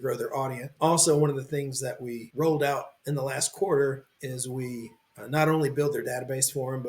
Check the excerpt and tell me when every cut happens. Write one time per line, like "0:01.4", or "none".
0:03.0
0:04.1